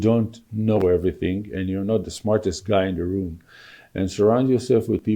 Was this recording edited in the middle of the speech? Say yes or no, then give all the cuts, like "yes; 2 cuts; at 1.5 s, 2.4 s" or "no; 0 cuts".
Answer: no; 0 cuts